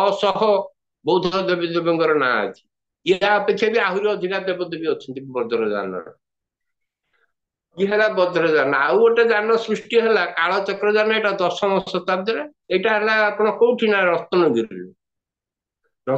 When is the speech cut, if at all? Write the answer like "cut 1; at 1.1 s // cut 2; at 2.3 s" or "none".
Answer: none